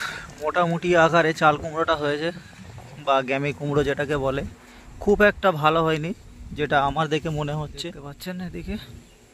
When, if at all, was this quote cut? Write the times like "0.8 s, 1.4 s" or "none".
8.1 s